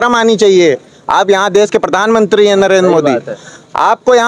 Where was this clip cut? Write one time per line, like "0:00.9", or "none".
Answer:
none